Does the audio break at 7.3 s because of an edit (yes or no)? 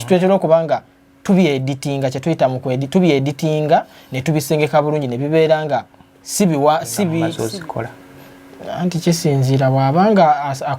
yes